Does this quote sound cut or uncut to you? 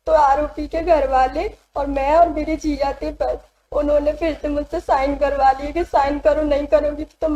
uncut